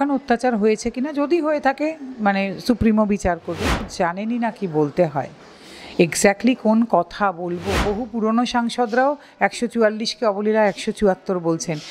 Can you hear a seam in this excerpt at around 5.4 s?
no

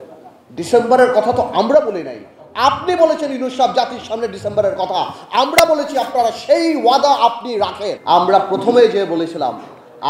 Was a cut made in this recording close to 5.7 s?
no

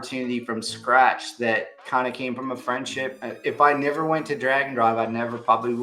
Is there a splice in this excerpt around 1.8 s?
yes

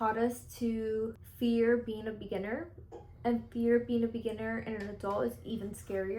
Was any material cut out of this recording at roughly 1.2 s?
yes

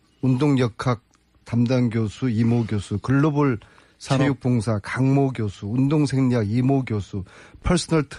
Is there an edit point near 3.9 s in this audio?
yes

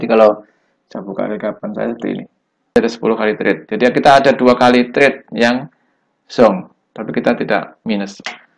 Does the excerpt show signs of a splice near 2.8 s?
yes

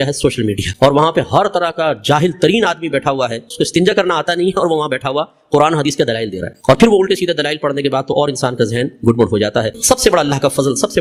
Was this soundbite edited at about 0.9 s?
no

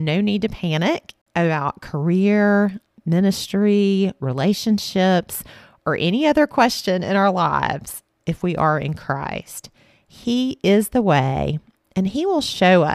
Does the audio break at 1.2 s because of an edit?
yes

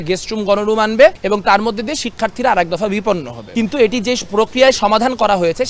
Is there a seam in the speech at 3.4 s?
yes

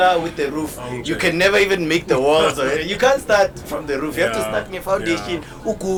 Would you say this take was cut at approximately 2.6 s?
no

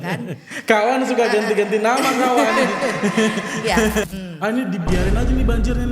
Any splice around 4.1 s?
yes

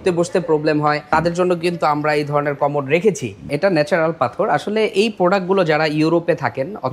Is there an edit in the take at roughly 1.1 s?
yes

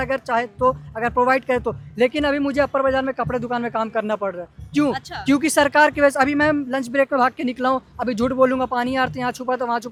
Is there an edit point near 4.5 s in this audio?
no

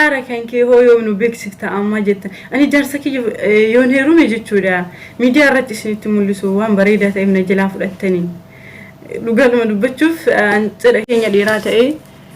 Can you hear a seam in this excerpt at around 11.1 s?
yes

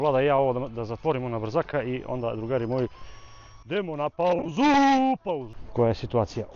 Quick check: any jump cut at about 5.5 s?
yes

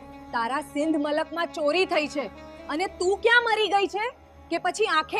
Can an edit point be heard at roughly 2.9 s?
no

